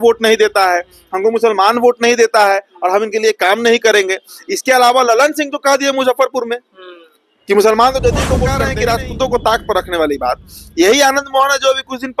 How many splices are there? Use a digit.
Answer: 1